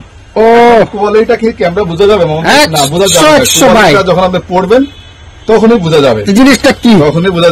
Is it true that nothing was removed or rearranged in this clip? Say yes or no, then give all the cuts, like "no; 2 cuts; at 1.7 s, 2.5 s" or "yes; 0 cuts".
yes; 0 cuts